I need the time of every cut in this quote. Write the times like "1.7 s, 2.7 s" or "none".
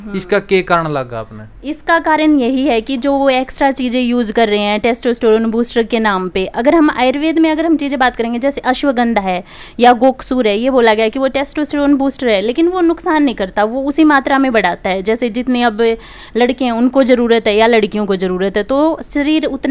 none